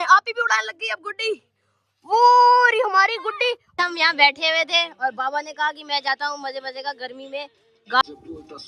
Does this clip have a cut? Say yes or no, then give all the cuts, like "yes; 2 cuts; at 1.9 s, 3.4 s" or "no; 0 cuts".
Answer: yes; 2 cuts; at 3.8 s, 8.0 s